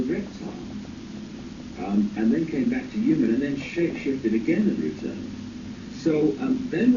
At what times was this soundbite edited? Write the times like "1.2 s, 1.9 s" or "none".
2.1 s